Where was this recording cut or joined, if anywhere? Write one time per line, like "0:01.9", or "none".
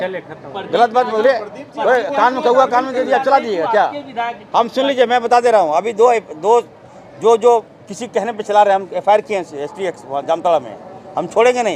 none